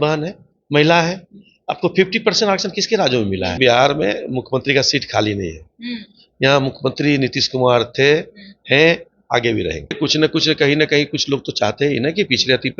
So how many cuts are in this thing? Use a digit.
2